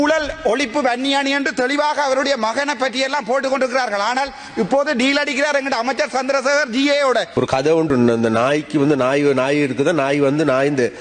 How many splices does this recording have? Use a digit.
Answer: 1